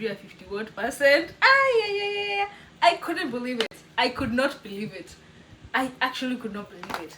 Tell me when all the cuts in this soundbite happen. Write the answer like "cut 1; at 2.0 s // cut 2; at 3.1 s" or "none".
none